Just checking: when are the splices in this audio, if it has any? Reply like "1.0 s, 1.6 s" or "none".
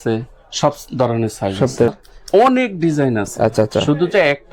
1.9 s